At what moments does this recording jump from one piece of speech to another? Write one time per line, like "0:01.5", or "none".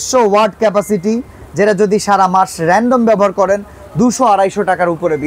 none